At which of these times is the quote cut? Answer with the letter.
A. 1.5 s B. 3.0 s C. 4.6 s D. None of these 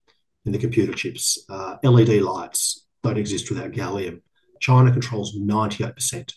C